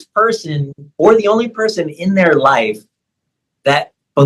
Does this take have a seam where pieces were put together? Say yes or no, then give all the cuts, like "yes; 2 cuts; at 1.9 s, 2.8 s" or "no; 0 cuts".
no; 0 cuts